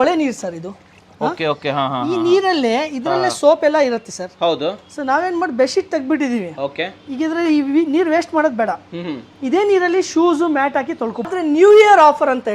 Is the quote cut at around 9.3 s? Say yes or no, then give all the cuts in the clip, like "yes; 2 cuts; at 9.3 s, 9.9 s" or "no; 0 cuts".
no; 1 cut; at 11.3 s